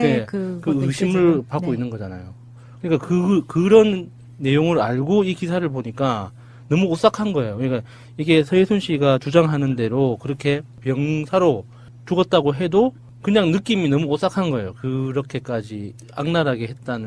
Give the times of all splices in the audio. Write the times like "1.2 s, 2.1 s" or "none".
11.7 s